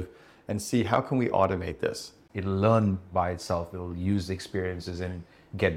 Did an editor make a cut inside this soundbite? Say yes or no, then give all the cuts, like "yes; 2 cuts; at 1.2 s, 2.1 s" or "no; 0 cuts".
yes; 1 cut; at 2.1 s